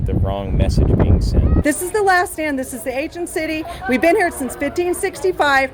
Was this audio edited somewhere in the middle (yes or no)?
yes